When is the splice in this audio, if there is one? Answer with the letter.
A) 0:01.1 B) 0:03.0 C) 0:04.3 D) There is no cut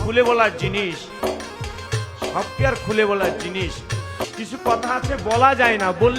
C